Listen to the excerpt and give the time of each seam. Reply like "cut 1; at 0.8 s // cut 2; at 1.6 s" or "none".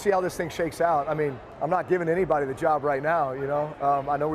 cut 1; at 1.5 s